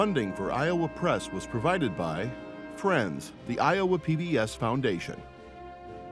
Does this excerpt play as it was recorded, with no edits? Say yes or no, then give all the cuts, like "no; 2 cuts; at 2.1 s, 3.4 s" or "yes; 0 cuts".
no; 1 cut; at 5.2 s